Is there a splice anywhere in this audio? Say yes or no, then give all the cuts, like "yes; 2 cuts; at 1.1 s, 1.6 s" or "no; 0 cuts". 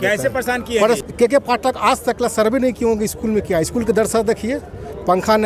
yes; 1 cut; at 1.0 s